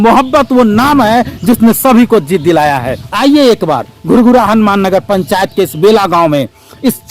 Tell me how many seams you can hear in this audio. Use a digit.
1